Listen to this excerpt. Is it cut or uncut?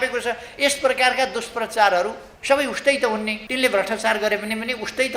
cut